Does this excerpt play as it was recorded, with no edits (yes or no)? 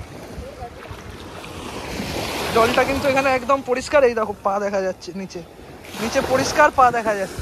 yes